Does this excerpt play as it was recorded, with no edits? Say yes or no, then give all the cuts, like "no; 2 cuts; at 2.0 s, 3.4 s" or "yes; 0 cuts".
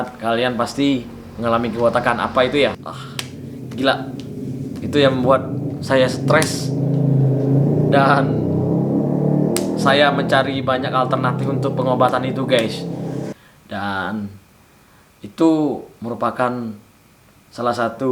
no; 2 cuts; at 2.8 s, 13.3 s